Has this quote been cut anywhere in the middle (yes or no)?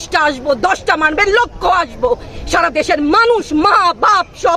no